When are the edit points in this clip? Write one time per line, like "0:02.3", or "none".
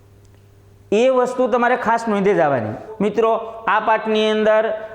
0:02.8